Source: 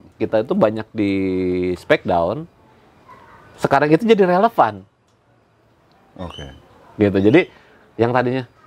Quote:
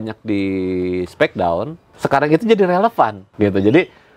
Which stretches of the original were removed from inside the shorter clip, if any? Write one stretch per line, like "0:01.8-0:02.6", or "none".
0:02.5-0:03.4
0:04.8-0:06.8